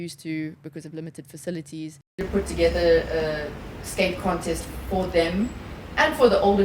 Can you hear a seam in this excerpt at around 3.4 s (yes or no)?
no